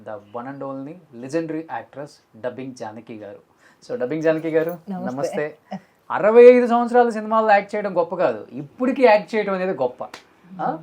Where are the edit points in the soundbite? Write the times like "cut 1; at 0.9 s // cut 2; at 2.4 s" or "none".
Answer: cut 1; at 5.9 s